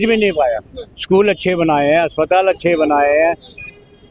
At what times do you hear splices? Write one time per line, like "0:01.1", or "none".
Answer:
none